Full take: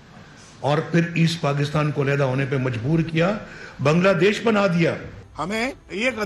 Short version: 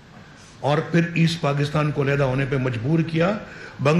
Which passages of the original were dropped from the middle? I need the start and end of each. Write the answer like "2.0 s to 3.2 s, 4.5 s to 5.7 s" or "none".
none